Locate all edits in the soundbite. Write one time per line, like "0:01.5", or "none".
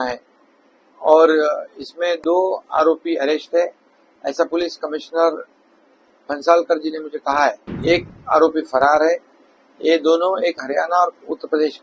0:07.7

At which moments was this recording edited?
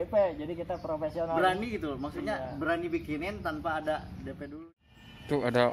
0:04.4

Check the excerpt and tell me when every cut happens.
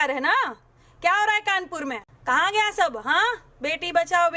0:02.1

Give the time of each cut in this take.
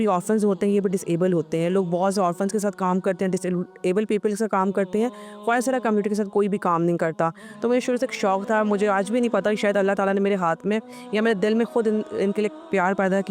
none

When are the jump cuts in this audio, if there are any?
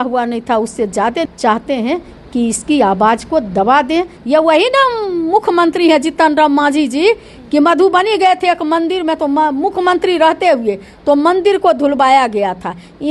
0:01.2
0:04.2

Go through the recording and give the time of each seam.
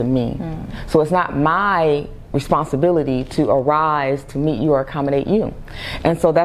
none

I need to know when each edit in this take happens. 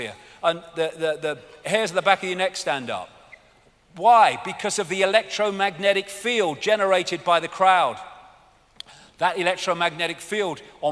0:09.0

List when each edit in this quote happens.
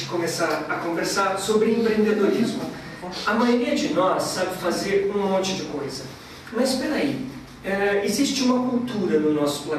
0:01.4

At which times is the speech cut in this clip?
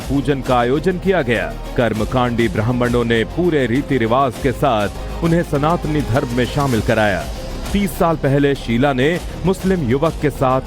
0:03.3

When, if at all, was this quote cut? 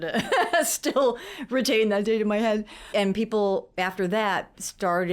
0:02.9

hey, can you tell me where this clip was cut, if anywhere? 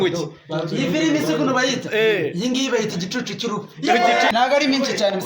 0:04.3

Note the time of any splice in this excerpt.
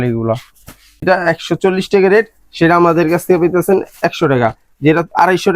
0:01.0

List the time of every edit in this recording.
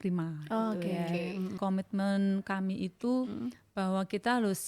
0:01.6

